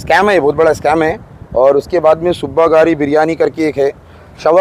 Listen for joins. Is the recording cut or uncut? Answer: uncut